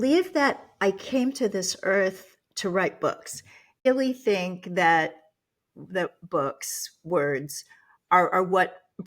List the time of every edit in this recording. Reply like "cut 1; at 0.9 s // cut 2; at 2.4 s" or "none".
cut 1; at 3.9 s